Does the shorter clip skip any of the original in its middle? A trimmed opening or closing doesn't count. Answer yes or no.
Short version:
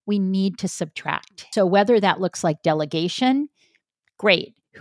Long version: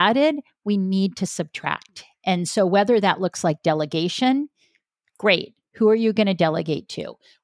yes